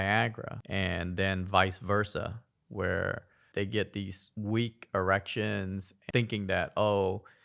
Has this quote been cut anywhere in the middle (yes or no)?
yes